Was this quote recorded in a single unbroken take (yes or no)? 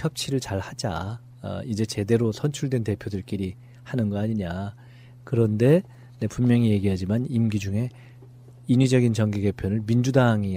yes